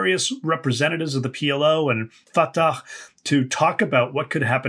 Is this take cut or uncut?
cut